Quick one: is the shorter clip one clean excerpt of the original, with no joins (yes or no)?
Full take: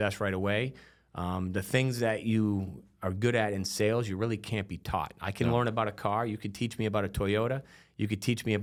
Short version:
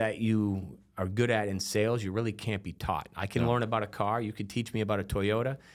yes